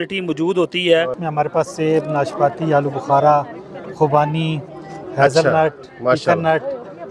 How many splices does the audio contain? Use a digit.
1